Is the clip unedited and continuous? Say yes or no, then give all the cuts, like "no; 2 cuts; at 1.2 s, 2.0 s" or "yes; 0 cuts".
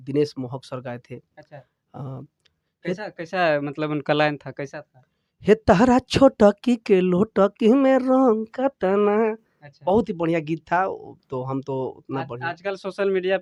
yes; 0 cuts